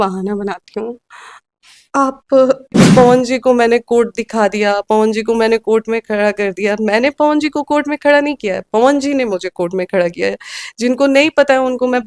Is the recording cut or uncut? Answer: cut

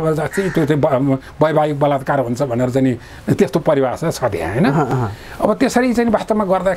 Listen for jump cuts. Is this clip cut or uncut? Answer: uncut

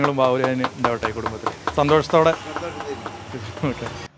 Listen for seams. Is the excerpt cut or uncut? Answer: uncut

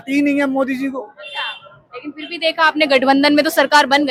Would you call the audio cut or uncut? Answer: uncut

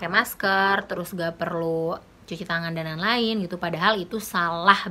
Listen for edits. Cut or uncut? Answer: uncut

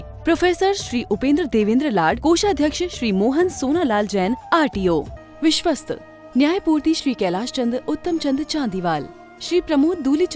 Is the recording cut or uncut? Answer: cut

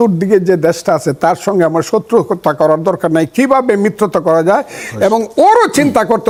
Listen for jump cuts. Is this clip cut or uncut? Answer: uncut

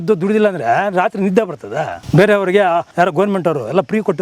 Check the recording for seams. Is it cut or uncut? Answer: cut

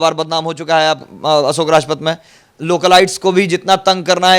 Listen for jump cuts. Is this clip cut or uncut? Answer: uncut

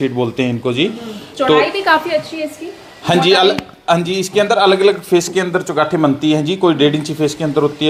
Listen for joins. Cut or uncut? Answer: uncut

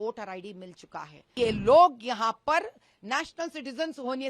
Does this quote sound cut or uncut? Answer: cut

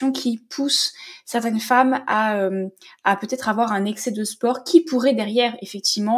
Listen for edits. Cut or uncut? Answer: uncut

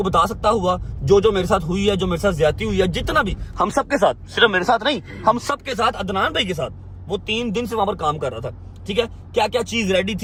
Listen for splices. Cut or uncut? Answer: uncut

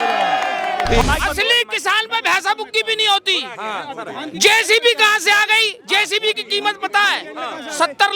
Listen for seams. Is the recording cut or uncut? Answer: cut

